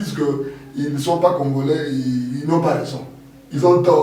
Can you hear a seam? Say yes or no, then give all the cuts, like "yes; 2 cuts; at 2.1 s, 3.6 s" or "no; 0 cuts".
no; 0 cuts